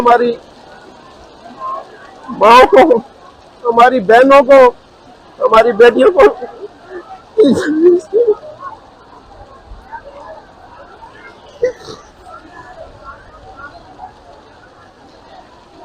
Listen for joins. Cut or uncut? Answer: uncut